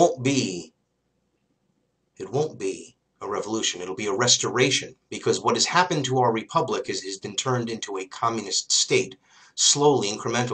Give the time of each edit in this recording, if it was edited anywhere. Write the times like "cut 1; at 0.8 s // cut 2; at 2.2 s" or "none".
none